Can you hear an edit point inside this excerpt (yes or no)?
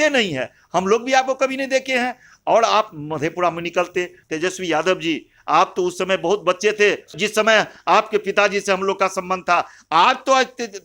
yes